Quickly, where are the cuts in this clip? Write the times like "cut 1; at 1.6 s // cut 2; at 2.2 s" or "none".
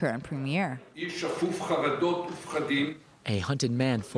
cut 1; at 2.8 s

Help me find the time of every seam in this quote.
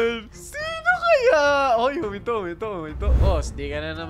cut 1; at 3.1 s

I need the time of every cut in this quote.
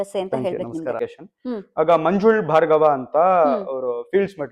cut 1; at 1.0 s

